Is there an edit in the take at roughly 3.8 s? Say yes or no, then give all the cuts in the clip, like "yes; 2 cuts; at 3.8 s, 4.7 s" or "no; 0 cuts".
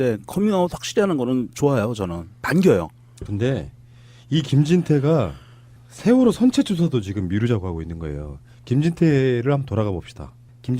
yes; 1 cut; at 3.8 s